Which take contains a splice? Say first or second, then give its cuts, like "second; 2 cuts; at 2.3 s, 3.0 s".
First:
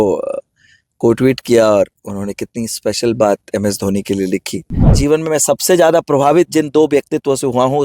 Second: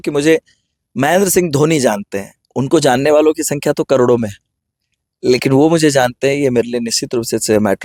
first; 1 cut; at 5.0 s